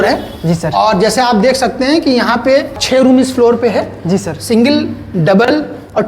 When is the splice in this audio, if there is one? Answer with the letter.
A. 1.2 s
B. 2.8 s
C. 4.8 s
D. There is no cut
B